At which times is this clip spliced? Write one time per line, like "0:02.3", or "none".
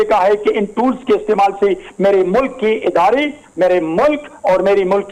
none